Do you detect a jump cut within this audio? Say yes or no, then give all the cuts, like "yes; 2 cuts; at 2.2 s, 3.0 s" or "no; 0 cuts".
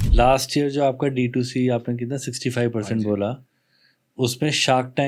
no; 0 cuts